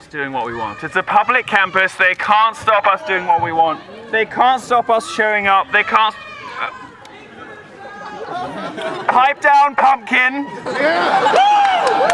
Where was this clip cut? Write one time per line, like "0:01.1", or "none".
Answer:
0:08.0